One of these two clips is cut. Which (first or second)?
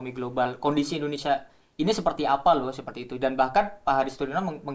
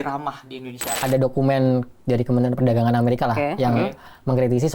second